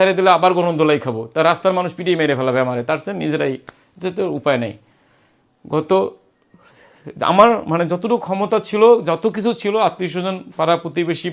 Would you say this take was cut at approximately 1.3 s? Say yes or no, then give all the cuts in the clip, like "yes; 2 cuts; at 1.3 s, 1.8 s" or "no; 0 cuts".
no; 0 cuts